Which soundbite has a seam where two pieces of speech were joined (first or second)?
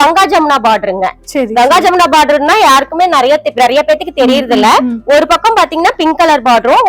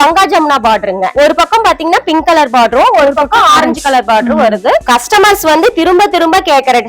second